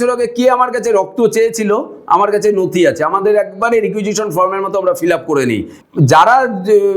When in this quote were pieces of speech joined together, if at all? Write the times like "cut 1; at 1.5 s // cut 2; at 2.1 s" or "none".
cut 1; at 5.7 s